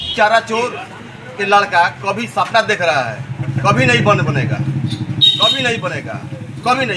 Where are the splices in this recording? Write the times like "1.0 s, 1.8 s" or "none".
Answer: none